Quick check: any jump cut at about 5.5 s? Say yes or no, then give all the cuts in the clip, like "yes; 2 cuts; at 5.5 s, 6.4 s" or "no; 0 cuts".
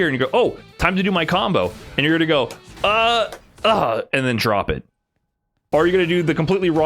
yes; 1 cut; at 5.5 s